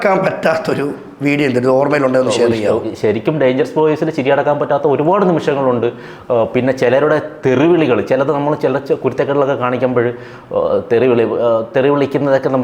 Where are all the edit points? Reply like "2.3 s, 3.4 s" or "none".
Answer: none